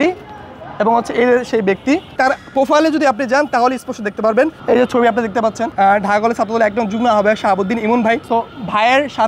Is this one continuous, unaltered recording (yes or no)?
no